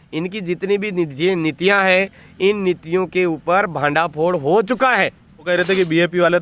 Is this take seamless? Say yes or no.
no